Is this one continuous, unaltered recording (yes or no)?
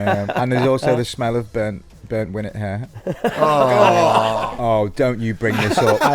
no